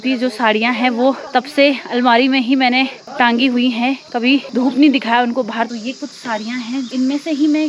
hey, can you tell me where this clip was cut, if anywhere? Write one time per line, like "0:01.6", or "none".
0:01.2
0:03.0
0:04.5
0:05.7
0:06.9